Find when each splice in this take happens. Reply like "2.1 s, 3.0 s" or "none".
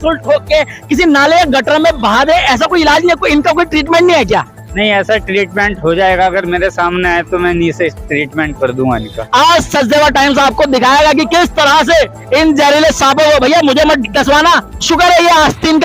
9.1 s, 14.7 s